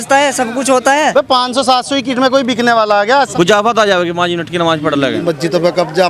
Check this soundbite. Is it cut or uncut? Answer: cut